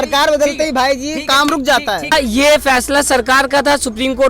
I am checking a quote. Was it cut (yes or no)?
yes